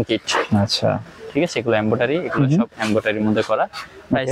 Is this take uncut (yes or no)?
no